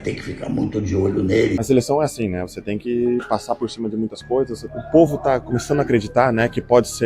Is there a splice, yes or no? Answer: yes